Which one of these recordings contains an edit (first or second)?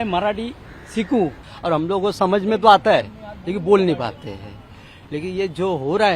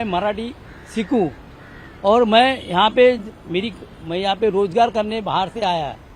first